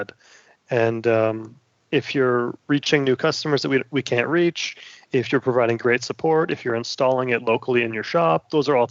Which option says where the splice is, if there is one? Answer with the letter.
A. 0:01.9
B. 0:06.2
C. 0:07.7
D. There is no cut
D